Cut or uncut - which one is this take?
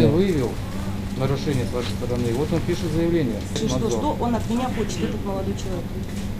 cut